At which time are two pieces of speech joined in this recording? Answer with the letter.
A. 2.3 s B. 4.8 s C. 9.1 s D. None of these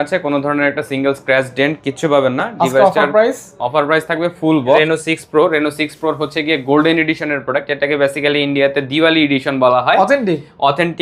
B